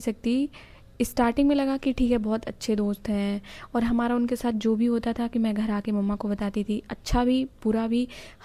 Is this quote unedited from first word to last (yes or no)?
yes